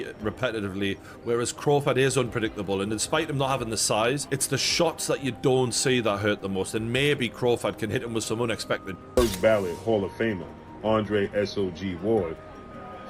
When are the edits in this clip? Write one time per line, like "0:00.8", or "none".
0:09.2